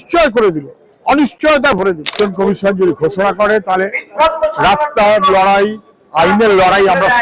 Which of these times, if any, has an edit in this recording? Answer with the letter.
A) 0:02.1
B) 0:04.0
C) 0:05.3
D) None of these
A